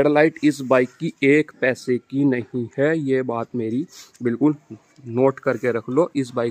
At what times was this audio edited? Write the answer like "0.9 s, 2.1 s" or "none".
none